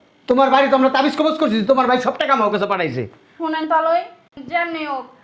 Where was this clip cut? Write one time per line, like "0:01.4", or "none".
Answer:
none